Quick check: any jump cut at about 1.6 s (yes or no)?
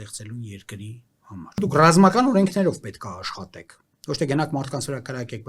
yes